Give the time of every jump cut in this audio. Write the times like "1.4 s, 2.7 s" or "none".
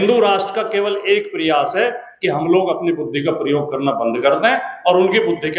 none